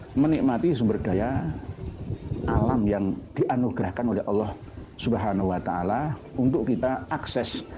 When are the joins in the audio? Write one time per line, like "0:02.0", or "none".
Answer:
none